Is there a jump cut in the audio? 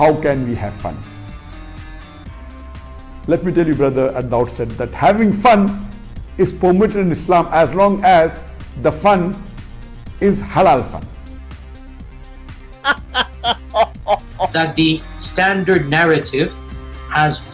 no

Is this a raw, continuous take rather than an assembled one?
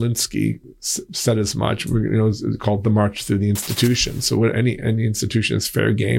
yes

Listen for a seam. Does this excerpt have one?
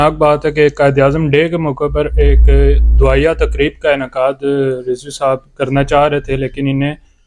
no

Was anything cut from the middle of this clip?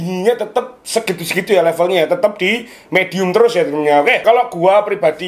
yes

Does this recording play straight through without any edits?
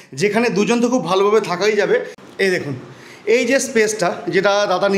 no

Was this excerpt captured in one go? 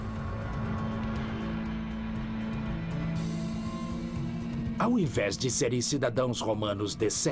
no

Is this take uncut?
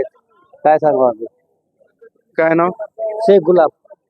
yes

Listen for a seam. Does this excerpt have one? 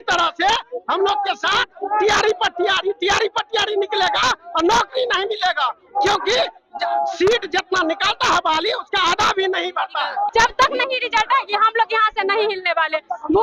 yes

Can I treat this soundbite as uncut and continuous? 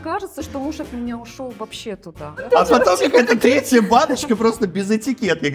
no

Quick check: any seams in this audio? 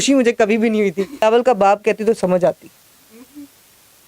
yes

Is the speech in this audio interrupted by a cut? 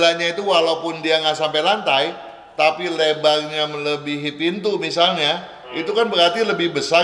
no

